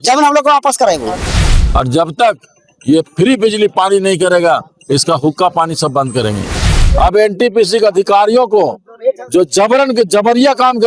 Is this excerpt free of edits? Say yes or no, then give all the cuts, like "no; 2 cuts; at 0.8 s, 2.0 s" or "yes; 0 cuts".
no; 2 cuts; at 1.4 s, 6.7 s